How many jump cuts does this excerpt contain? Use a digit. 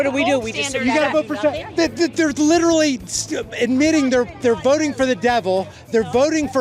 1